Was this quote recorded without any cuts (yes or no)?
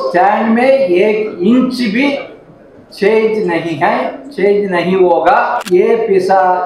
no